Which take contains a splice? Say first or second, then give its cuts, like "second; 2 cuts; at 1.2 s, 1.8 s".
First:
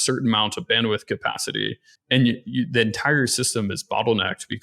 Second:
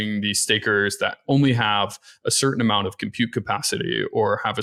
first; 1 cut; at 1.9 s